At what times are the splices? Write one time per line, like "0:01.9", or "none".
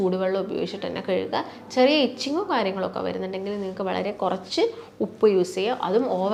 none